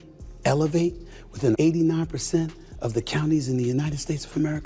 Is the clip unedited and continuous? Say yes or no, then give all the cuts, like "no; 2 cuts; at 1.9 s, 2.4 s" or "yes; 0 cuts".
yes; 0 cuts